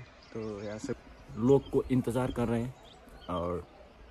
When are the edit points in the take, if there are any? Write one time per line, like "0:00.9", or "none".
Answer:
0:00.9